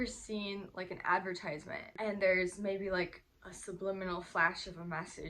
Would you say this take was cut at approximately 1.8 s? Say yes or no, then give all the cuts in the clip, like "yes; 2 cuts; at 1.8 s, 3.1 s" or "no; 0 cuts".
yes; 1 cut; at 1.8 s